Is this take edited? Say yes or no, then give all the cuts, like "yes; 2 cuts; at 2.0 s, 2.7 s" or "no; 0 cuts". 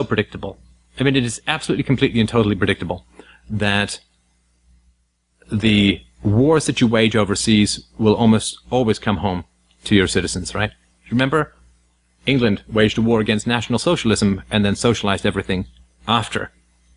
no; 0 cuts